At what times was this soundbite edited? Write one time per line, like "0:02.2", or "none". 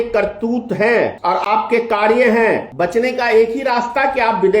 0:01.2
0:02.7